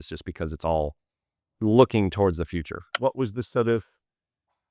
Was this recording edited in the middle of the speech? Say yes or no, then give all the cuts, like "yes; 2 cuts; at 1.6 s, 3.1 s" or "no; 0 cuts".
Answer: yes; 1 cut; at 2.9 s